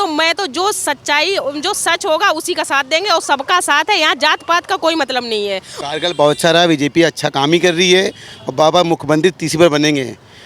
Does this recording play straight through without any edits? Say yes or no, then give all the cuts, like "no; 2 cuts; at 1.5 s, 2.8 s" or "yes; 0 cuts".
no; 1 cut; at 5.7 s